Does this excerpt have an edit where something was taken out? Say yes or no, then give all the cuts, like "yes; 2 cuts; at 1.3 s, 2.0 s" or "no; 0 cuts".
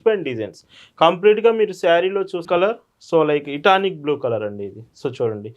yes; 1 cut; at 2.5 s